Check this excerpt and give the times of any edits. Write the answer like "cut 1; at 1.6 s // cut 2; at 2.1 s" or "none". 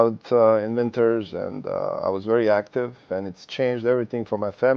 cut 1; at 3.0 s